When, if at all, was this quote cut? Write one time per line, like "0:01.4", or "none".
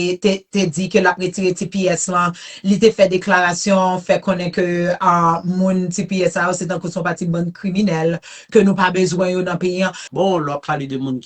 0:10.0